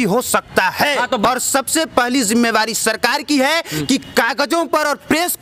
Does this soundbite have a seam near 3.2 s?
no; 1 cut; at 1.2 s

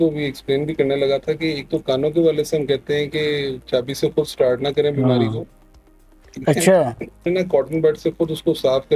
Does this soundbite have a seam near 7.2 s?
yes; 1 cut; at 7.2 s

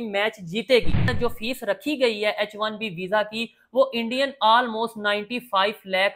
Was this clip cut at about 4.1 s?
no; 1 cut; at 1.1 s

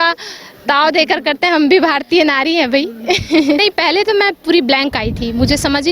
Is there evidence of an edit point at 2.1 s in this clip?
no; 1 cut; at 3.6 s

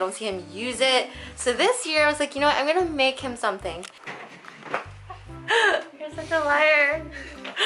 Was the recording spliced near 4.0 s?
yes; 1 cut; at 4.0 s

